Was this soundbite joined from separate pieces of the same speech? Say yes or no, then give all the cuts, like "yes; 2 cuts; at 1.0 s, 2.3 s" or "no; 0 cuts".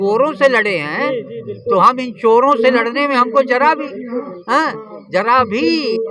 no; 0 cuts